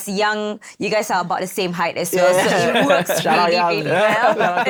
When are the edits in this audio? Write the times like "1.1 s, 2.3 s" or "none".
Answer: none